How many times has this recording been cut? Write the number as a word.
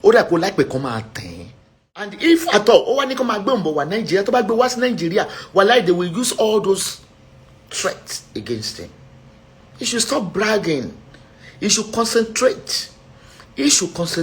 one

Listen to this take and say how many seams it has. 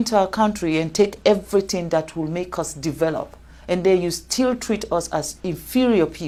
zero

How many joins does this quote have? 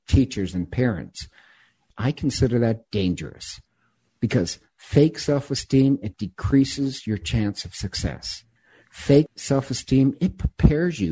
two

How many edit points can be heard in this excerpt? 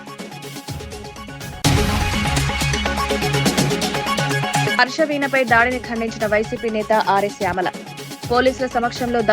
one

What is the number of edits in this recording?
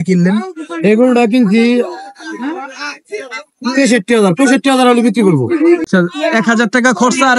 one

